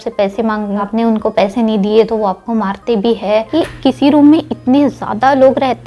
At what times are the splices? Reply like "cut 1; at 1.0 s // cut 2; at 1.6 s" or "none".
cut 1; at 0.8 s // cut 2; at 3.5 s